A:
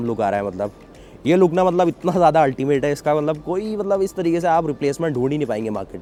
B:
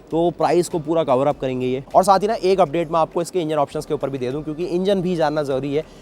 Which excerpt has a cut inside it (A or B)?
B